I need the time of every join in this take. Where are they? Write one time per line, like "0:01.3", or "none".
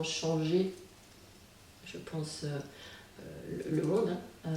0:03.1

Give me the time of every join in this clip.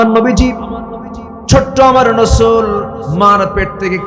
none

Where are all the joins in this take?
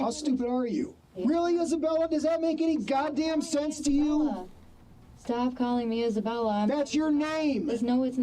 0:01.2

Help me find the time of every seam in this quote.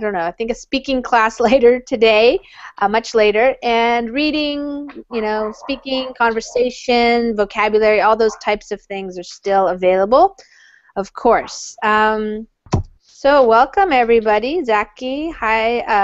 0:14.6

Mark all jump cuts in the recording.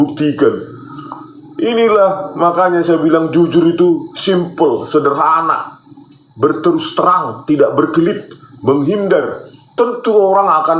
0:09.7

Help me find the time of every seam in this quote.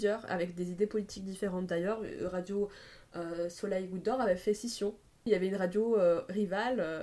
0:05.3

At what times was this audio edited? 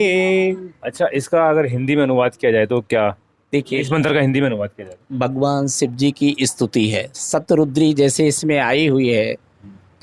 none

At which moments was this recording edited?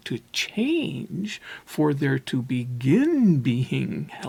none

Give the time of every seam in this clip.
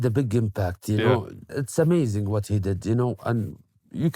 0:01.5

